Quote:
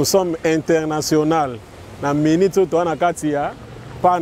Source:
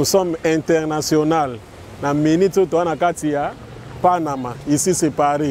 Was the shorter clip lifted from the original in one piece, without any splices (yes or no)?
yes